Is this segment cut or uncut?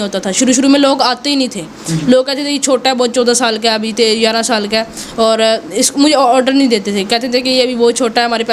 uncut